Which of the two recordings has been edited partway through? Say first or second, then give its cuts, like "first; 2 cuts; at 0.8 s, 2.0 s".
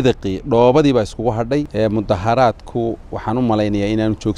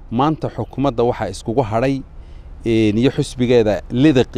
first; 1 cut; at 1.7 s